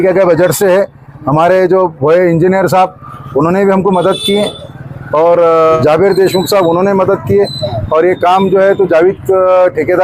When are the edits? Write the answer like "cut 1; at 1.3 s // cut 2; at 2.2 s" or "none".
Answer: cut 1; at 5.8 s